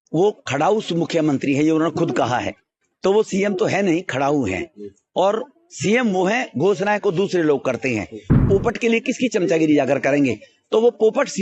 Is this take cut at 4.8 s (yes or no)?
no